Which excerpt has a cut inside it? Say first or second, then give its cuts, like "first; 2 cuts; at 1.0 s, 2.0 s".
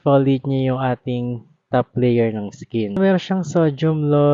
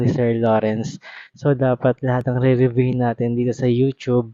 first; 1 cut; at 3.0 s